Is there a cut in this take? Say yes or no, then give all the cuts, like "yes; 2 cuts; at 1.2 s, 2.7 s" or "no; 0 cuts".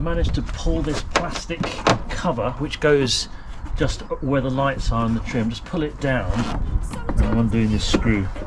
yes; 1 cut; at 6.5 s